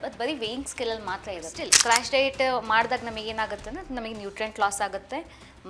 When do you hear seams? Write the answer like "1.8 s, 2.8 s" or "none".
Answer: 1.6 s